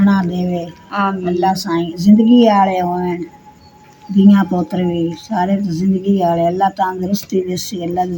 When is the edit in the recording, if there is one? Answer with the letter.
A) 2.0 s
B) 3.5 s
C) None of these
C